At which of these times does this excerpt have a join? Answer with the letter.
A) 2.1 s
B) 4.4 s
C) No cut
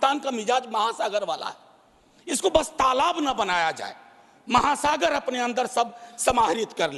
C